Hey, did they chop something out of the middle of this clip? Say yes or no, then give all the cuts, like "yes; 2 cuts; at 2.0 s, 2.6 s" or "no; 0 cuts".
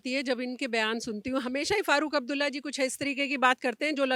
no; 0 cuts